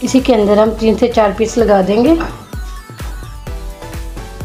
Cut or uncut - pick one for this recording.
uncut